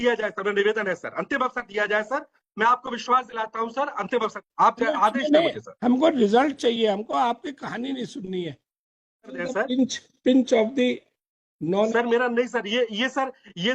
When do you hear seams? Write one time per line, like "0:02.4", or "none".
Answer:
0:04.4
0:09.4